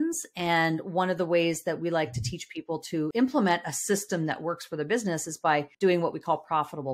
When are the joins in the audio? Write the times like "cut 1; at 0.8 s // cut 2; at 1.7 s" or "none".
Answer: cut 1; at 3.1 s // cut 2; at 5.7 s